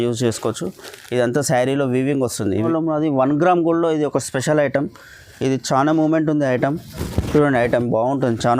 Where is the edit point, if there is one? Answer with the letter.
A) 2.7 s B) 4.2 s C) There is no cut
A